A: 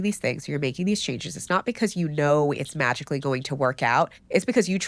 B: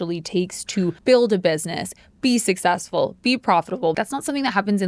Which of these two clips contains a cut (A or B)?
B